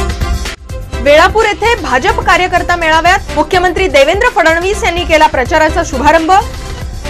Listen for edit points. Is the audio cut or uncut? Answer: uncut